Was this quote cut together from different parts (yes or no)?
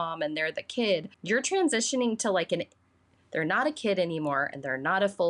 yes